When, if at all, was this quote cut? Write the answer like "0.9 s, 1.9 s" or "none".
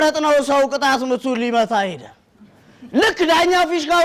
none